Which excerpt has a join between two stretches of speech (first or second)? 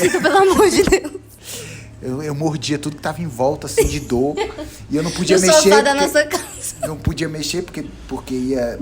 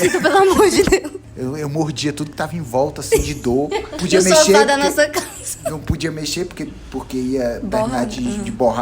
second